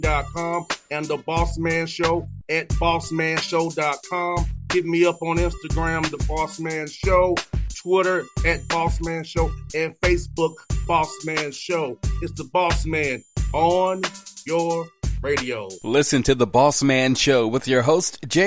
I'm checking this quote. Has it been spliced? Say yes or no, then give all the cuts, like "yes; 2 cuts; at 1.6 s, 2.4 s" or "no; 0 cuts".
no; 0 cuts